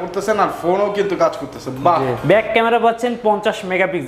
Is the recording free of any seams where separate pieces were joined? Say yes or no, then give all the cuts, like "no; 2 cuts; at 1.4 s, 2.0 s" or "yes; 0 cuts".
no; 1 cut; at 2.2 s